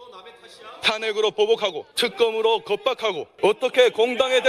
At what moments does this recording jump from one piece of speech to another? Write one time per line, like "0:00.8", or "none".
0:01.9
0:03.3